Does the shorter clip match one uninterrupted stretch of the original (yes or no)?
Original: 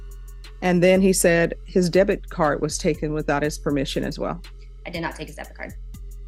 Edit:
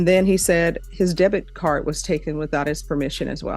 yes